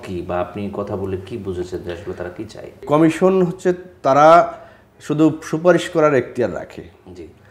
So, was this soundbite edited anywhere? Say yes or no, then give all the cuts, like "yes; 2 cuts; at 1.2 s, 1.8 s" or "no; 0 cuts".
yes; 1 cut; at 2.7 s